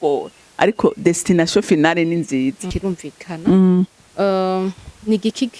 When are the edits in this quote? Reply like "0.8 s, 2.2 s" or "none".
2.7 s